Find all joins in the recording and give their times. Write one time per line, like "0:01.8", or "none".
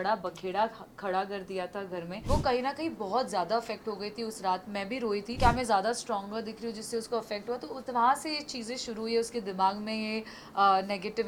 0:02.1
0:05.3